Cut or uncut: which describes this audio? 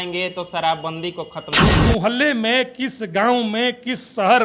cut